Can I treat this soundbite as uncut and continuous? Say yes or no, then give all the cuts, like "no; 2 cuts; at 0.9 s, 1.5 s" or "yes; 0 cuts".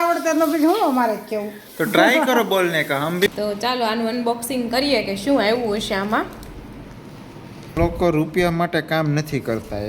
no; 2 cuts; at 3.3 s, 7.8 s